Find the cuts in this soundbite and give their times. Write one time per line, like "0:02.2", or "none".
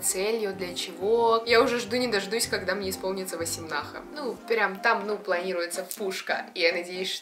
0:01.4
0:04.0